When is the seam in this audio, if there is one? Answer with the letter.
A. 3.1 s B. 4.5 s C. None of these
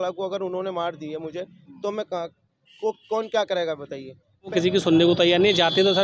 B